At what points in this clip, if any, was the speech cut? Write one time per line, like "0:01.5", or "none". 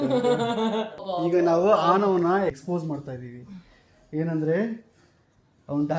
0:01.0
0:02.5